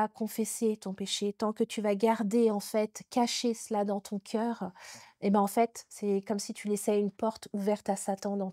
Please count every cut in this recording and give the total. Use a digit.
0